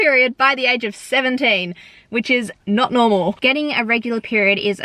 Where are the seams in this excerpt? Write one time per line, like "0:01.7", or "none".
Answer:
0:03.4